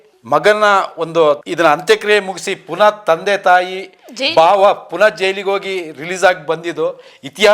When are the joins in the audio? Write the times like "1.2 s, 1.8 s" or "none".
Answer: 1.5 s